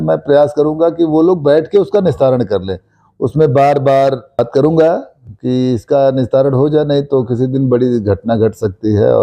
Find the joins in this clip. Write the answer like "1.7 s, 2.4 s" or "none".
4.4 s